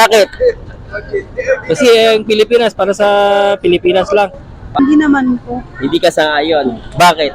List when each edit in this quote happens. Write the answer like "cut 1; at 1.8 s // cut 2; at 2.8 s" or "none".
cut 1; at 4.8 s